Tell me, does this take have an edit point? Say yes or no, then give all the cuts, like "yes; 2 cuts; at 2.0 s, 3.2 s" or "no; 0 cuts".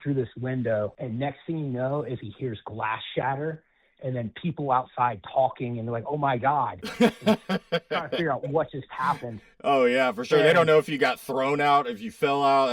yes; 1 cut; at 1.0 s